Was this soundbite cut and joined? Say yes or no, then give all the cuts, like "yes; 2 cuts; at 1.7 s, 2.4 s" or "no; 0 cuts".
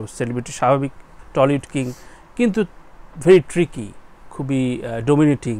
yes; 1 cut; at 1.2 s